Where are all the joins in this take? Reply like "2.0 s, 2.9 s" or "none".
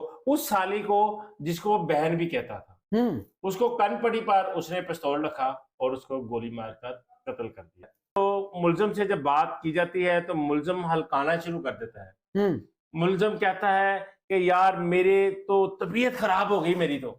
8.2 s

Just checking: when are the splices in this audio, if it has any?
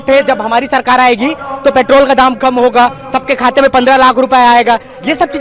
none

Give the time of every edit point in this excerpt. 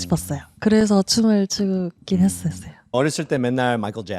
2.9 s

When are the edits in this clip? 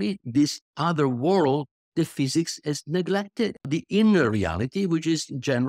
3.6 s

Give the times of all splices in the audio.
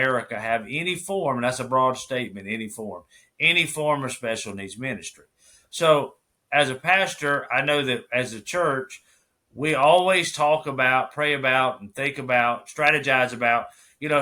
none

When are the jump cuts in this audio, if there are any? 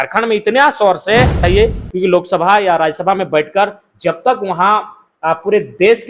1.4 s

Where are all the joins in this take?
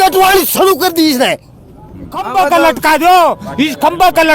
2.3 s

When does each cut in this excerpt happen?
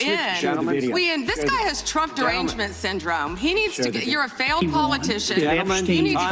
none

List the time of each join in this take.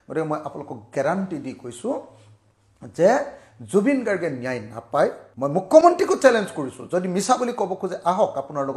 5.3 s

